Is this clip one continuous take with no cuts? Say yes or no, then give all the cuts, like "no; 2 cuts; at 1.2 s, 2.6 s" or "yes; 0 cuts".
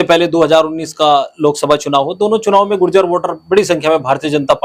yes; 0 cuts